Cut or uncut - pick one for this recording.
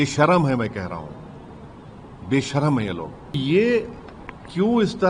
cut